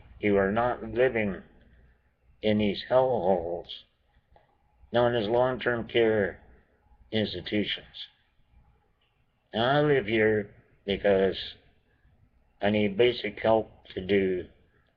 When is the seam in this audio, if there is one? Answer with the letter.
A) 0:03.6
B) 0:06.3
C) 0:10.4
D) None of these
C